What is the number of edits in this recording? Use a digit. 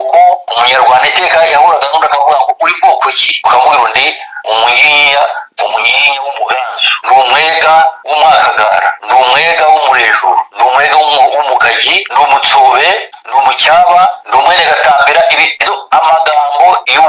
0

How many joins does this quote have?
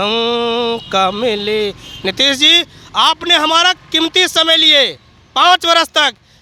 0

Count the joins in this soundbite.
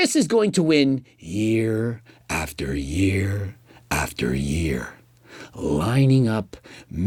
0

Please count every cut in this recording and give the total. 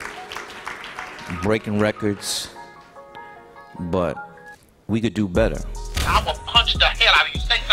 1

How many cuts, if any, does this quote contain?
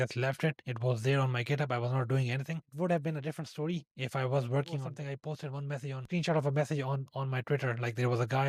1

